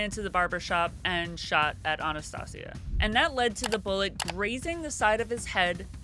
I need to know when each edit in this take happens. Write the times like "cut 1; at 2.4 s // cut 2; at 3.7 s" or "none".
cut 1; at 2.9 s